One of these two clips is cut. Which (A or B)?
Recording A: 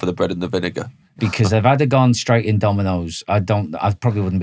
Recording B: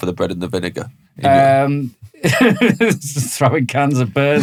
A